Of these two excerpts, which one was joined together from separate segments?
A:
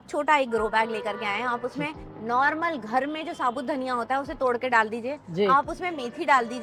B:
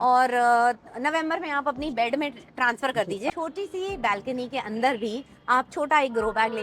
B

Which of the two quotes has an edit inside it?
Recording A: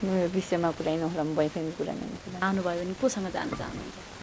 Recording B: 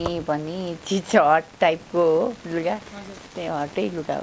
A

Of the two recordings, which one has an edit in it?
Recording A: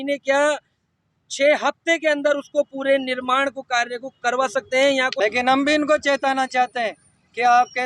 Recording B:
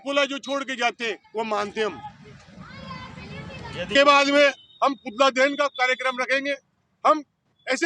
A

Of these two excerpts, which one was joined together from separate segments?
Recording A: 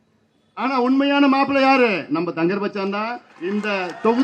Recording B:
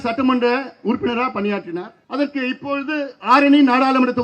B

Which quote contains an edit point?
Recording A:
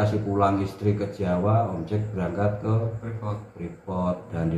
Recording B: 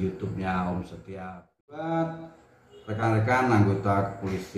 B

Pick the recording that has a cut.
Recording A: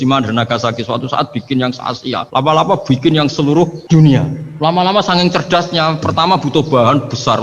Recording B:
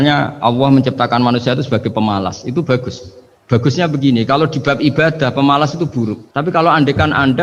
A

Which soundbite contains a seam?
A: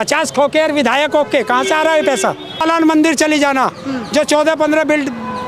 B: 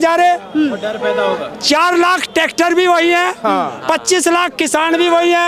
A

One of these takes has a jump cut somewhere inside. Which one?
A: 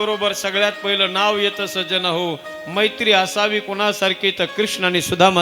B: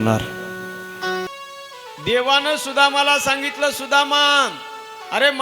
B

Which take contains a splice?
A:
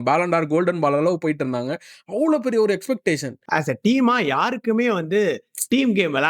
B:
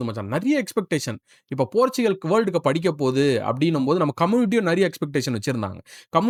A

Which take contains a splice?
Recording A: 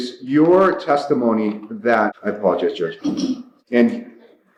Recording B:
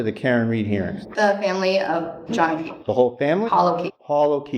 B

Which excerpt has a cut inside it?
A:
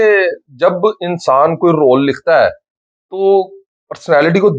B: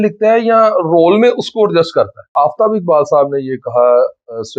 B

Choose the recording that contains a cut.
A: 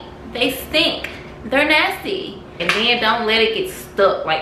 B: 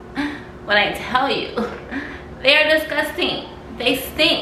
A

